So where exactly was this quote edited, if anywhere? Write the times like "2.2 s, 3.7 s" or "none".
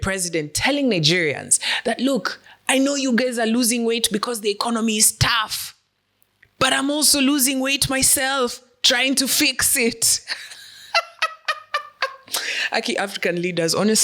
none

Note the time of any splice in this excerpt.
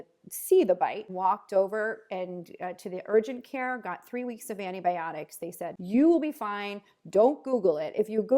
1.0 s, 5.7 s

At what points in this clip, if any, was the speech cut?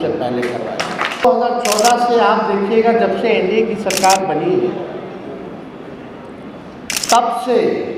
1.2 s

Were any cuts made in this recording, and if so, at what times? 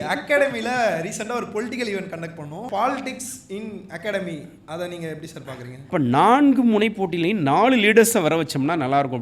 2.6 s, 5.7 s

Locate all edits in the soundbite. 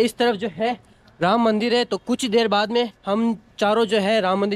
none

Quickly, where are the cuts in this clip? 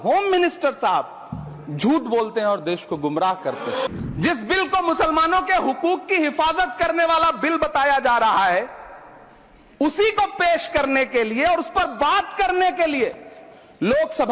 3.9 s

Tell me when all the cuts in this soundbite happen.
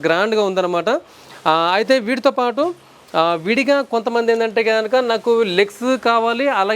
none

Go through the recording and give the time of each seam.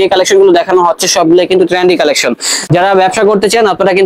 2.5 s

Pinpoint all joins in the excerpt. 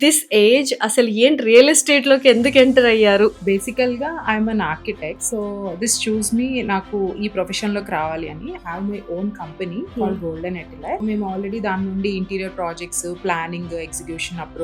3.4 s, 5.2 s, 9.9 s, 11.0 s

